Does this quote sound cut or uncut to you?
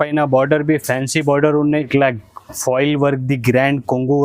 cut